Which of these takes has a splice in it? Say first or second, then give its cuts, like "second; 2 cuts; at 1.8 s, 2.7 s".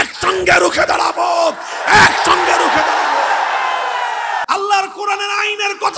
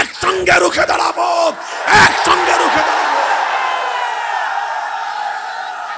first; 1 cut; at 4.4 s